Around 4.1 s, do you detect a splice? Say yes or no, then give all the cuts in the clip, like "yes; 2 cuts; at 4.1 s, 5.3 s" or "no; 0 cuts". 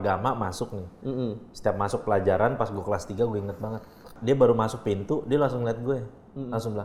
yes; 1 cut; at 4.1 s